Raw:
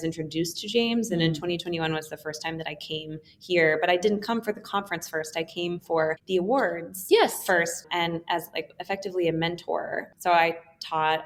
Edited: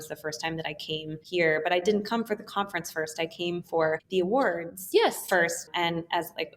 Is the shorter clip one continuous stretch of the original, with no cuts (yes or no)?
no